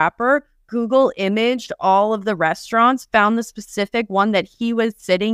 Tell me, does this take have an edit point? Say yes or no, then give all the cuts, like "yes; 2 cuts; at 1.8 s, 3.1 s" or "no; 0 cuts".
no; 0 cuts